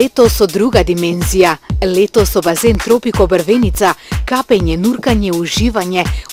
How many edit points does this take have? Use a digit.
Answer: 0